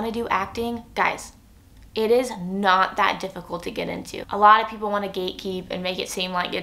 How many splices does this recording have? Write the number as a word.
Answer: one